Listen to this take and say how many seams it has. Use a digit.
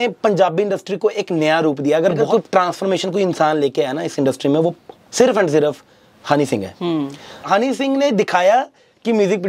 2